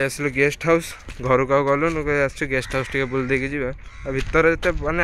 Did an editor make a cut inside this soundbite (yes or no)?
no